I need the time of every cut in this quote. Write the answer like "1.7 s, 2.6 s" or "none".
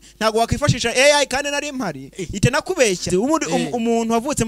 3.1 s